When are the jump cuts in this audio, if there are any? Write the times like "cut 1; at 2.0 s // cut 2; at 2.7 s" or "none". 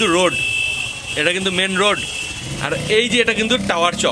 none